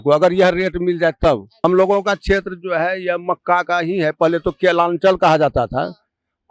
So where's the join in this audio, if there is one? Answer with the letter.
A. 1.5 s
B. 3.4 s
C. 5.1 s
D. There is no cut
A